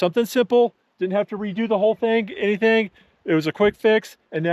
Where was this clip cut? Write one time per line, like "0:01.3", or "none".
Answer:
none